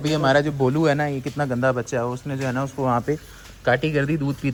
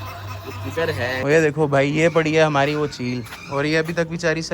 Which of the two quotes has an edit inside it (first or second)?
second